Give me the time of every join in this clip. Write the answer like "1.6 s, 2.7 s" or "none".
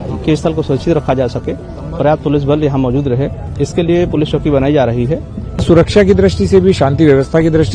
5.6 s